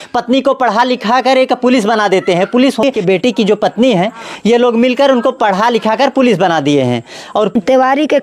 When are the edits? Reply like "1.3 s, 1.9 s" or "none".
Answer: 2.8 s, 7.5 s